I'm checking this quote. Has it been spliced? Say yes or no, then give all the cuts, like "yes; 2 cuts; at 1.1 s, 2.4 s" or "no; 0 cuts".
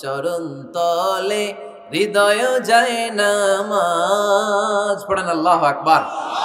no; 0 cuts